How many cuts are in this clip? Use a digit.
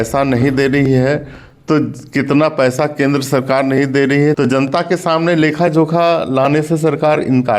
1